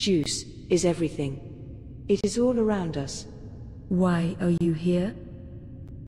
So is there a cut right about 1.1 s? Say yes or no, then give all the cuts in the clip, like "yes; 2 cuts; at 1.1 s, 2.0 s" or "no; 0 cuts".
no; 1 cut; at 5.1 s